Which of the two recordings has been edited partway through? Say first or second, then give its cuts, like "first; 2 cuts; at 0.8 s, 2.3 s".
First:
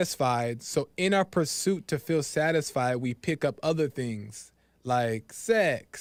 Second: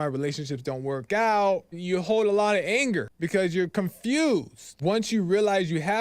second; 3 cuts; at 1.8 s, 3.1 s, 4.6 s